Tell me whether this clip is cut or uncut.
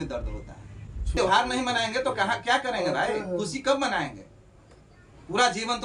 cut